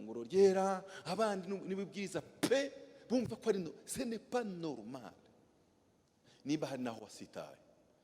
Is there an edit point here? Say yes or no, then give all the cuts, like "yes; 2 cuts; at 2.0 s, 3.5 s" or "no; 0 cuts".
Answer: yes; 1 cut; at 6.2 s